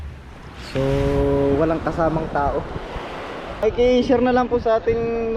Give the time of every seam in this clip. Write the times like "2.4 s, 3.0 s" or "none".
3.6 s